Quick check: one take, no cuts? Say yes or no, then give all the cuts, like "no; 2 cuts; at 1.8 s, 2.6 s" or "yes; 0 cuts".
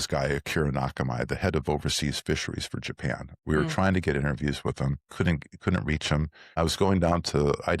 no; 2 cuts; at 5.0 s, 6.6 s